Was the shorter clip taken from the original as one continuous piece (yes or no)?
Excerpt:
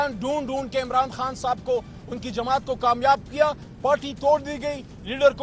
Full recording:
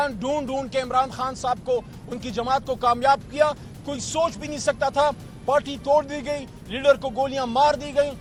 no